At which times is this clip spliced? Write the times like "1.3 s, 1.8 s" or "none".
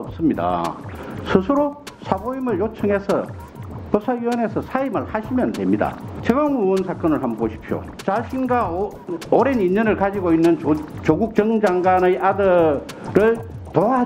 6.1 s, 7.9 s

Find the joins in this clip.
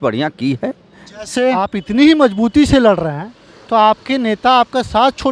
1.7 s

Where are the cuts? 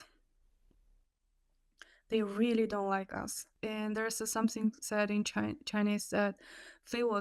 3.5 s

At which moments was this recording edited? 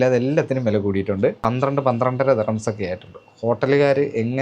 1.4 s

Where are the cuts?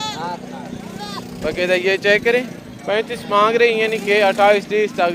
none

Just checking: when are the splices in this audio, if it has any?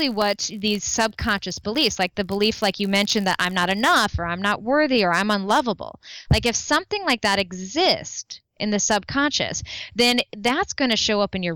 none

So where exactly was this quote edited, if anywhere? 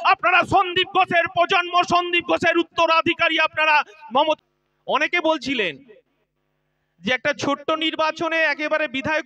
4.4 s

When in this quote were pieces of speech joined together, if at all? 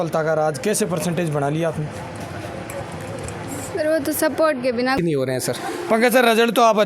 4.9 s

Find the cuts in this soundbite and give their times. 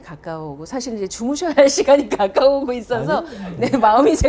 none

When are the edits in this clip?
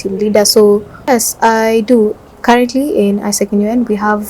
1.1 s

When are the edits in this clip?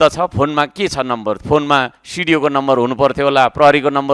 none

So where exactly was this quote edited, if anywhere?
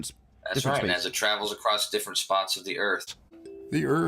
3.0 s

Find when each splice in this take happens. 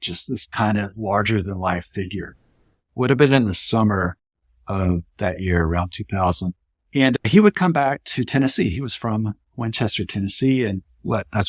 2.6 s

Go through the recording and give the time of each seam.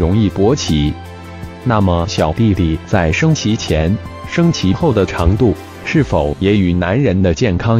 1.5 s

